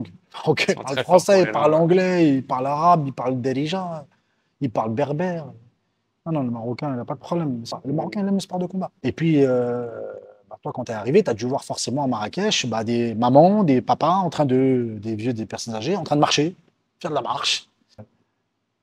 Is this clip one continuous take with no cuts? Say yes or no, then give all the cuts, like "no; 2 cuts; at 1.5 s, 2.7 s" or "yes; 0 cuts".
no; 2 cuts; at 7.8 s, 18.0 s